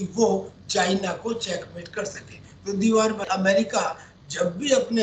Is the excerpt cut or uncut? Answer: cut